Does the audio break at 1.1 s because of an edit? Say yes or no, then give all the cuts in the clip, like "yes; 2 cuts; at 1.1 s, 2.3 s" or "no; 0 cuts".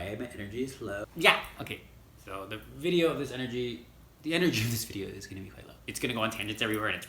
yes; 2 cuts; at 1.1 s, 5.8 s